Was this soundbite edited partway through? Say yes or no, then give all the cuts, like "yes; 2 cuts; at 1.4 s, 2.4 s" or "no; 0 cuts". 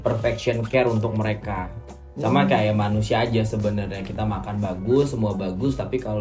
no; 0 cuts